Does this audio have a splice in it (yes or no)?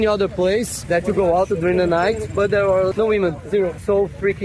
no